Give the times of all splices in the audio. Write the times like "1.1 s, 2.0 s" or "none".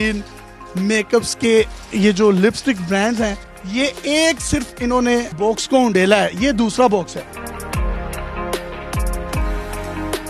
none